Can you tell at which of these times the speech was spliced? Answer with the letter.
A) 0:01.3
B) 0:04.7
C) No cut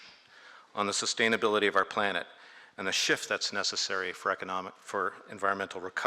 A